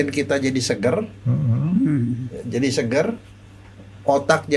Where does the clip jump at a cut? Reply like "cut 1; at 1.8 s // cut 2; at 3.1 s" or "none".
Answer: none